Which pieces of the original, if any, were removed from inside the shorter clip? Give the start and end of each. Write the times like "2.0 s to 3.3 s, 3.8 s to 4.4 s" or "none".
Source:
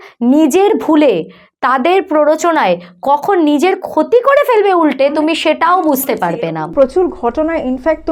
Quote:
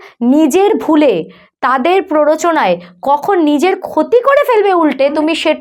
none